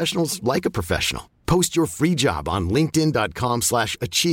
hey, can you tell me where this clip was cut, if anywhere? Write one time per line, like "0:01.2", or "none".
none